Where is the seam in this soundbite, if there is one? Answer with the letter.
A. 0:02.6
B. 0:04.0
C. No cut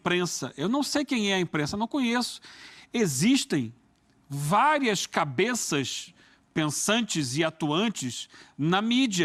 C